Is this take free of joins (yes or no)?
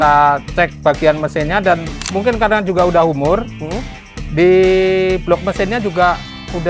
yes